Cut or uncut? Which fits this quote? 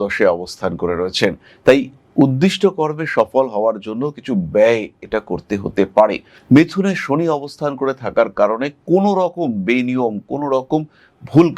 cut